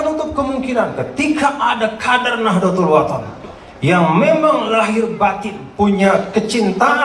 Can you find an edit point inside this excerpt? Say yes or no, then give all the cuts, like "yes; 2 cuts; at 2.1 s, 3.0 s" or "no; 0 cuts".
no; 0 cuts